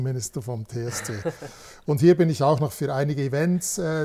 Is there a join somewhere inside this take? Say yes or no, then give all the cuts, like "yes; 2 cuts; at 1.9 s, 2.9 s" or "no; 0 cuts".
no; 0 cuts